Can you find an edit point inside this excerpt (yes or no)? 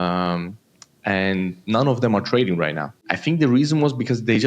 yes